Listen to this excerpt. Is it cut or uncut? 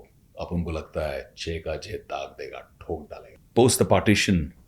cut